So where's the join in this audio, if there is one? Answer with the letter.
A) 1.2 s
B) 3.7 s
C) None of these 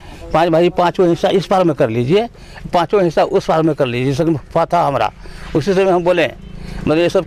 C